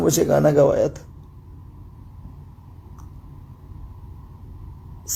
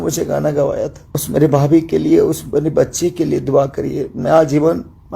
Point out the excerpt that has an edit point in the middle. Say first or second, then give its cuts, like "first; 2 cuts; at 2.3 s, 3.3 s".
second; 1 cut; at 1.1 s